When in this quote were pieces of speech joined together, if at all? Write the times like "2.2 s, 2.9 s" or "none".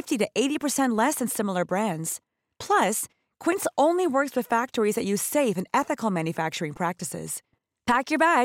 none